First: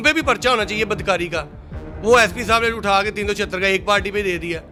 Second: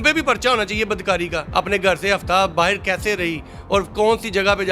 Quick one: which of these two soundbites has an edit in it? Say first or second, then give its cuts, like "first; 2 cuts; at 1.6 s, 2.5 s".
second; 1 cut; at 1.4 s